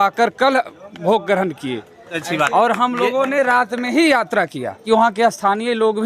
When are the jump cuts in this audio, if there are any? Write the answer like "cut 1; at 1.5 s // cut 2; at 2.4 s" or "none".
cut 1; at 2.2 s // cut 2; at 4.8 s